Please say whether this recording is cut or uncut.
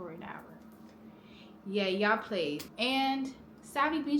cut